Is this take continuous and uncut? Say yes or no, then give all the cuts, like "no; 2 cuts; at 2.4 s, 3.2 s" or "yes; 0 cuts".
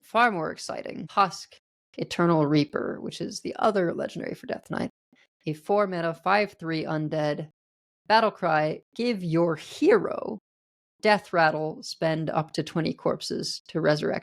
no; 1 cut; at 1.1 s